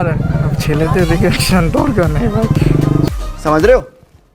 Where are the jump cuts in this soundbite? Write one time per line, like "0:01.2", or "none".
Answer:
0:03.1

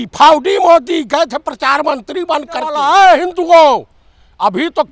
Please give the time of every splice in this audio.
0:02.8

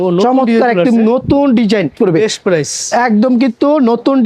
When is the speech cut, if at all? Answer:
0:01.9

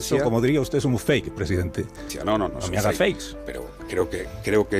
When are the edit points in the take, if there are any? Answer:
0:02.1

